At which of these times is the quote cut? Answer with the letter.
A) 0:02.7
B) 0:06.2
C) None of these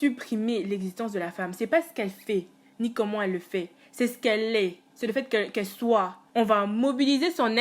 B